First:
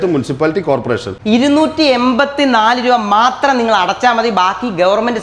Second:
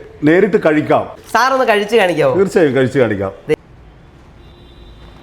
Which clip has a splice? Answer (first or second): second